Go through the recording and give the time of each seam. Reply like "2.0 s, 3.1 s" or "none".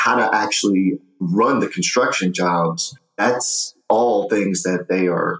1.0 s, 3.1 s